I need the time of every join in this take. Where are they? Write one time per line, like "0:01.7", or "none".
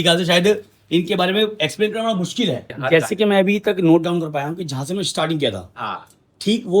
0:02.7